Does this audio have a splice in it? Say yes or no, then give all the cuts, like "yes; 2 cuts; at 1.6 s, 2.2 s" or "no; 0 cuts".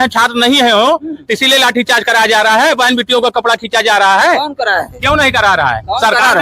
no; 0 cuts